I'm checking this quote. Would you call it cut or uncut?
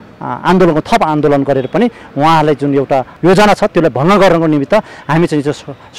uncut